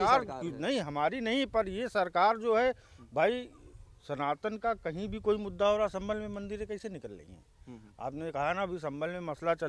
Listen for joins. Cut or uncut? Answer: uncut